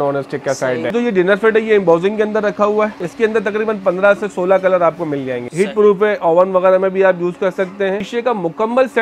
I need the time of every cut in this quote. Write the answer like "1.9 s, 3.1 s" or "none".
0.9 s, 3.0 s, 5.4 s, 8.1 s